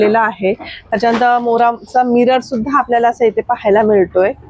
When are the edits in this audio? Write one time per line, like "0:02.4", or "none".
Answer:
none